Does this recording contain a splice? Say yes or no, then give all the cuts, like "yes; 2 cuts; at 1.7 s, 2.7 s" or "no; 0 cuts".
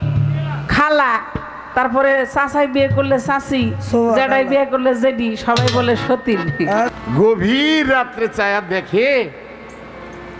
yes; 1 cut; at 6.9 s